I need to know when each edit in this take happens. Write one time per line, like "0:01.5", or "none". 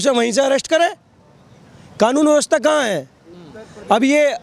none

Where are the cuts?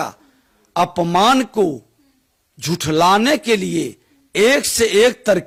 none

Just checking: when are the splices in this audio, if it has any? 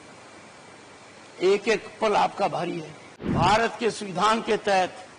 0:03.3

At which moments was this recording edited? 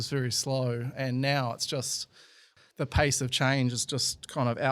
0:02.4

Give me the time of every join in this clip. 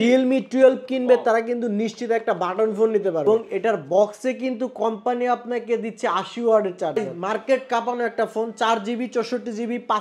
0:03.2
0:07.1

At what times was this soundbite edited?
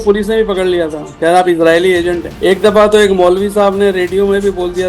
0:02.3

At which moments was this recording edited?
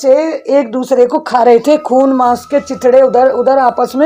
none

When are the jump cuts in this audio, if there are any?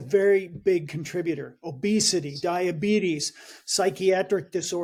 none

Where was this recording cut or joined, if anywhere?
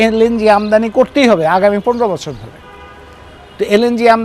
none

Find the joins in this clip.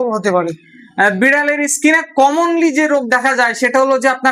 none

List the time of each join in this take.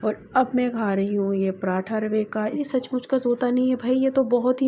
0:02.6

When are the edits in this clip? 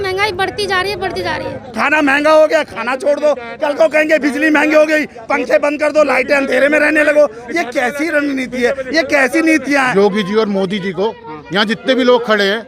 0:01.6
0:09.9

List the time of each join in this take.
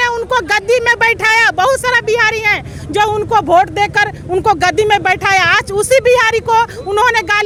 none

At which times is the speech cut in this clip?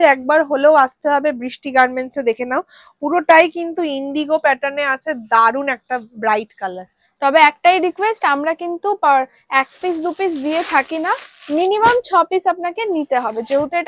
none

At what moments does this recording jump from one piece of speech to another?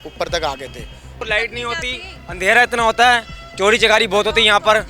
0:01.2

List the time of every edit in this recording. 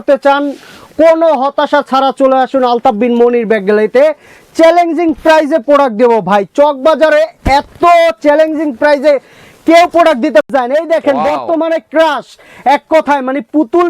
0:10.4

